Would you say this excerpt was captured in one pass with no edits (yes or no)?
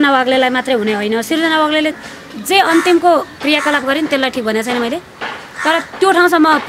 yes